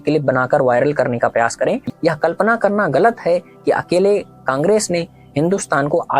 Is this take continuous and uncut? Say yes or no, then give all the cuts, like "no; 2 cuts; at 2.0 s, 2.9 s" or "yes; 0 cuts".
no; 1 cut; at 1.8 s